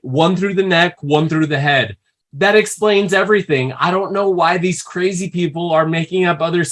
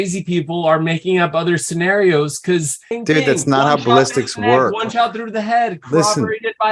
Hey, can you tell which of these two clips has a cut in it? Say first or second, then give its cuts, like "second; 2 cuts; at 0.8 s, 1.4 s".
second; 1 cut; at 2.8 s